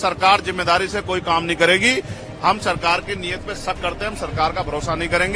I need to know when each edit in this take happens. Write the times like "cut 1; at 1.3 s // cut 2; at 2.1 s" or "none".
none

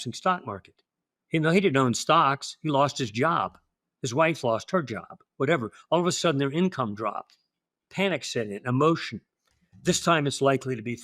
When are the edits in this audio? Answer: none

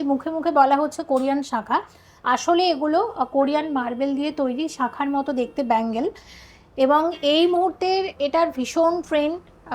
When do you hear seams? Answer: none

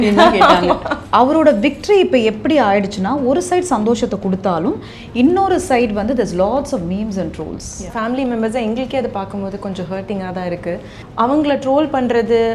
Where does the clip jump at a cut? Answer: cut 1; at 0.9 s // cut 2; at 7.9 s // cut 3; at 11.0 s

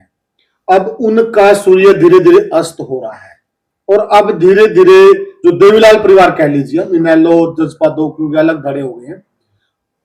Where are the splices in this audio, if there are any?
none

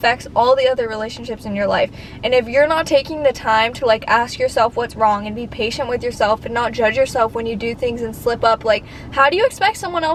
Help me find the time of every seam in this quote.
none

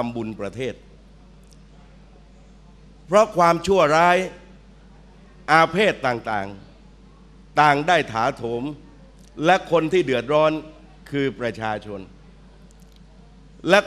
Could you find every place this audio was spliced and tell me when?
none

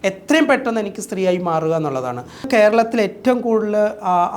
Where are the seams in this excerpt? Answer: cut 1; at 2.5 s

